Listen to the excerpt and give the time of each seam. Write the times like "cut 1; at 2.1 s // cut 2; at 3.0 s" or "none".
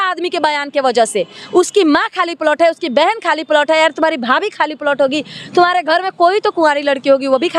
none